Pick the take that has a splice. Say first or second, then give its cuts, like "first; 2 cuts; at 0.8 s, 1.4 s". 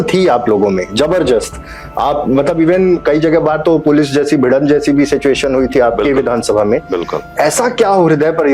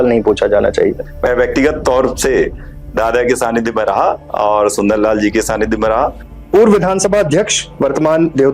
second; 2 cuts; at 1.0 s, 6.3 s